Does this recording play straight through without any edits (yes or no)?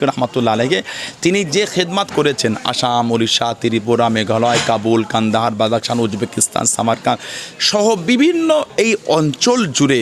yes